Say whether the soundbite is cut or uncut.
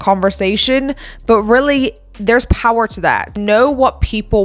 cut